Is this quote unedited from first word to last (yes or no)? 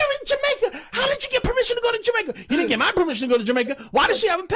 yes